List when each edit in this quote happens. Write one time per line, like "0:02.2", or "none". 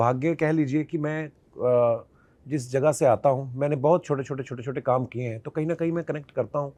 none